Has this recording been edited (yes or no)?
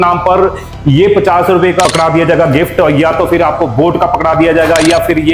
yes